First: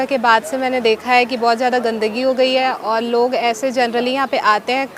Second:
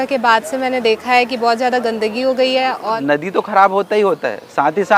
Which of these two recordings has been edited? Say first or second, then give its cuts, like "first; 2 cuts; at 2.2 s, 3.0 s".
second; 1 cut; at 3.0 s